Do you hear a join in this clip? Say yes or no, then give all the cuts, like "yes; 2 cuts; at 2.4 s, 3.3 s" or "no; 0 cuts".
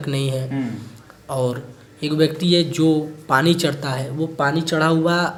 no; 0 cuts